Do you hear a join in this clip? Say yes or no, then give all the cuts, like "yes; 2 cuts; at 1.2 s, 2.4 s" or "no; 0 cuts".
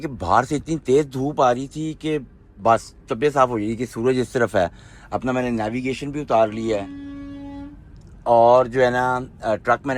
no; 0 cuts